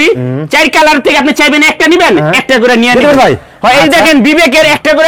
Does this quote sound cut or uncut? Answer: uncut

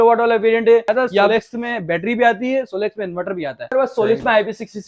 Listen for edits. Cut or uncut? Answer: cut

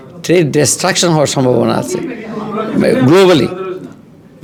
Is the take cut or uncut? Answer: uncut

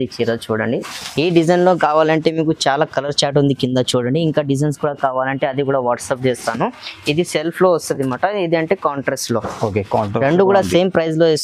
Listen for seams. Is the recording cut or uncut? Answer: uncut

